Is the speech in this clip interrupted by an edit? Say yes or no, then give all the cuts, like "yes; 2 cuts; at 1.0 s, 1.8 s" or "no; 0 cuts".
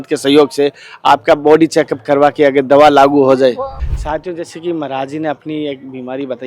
yes; 1 cut; at 3.8 s